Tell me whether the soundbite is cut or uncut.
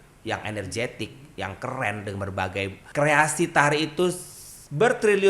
cut